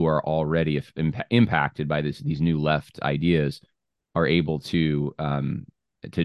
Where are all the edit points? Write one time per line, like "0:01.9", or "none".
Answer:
none